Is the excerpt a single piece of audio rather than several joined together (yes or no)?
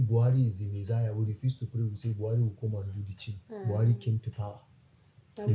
yes